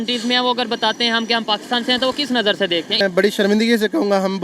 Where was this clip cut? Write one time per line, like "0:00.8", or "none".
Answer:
0:03.0